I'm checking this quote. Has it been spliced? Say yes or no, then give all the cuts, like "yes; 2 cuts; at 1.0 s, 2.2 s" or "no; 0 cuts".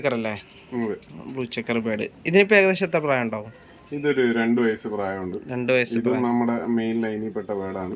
no; 0 cuts